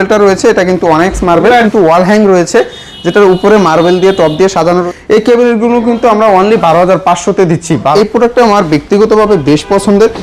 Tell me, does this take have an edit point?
yes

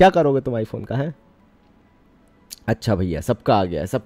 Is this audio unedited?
yes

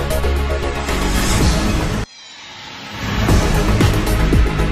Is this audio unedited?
yes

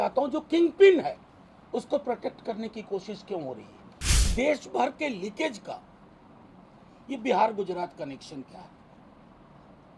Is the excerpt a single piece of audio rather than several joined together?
no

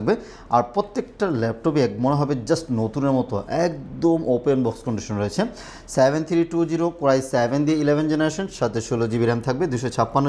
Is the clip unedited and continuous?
yes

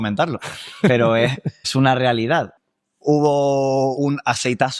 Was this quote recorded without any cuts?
no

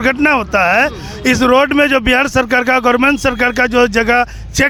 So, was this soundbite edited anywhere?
no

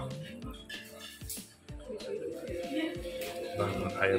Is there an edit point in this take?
no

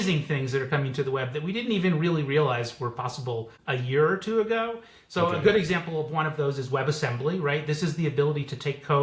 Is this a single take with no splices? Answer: no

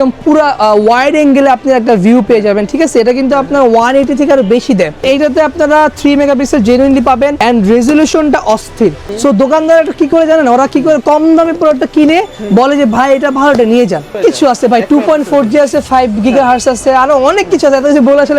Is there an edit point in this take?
yes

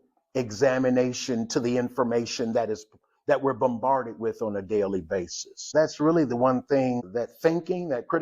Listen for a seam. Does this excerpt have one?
yes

